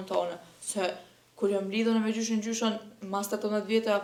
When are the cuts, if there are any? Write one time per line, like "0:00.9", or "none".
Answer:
none